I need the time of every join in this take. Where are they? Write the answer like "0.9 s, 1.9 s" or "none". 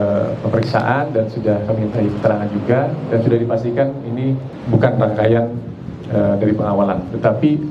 4.5 s